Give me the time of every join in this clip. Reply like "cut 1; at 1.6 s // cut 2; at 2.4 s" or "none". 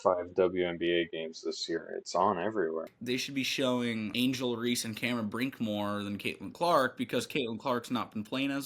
cut 1; at 2.9 s // cut 2; at 4.1 s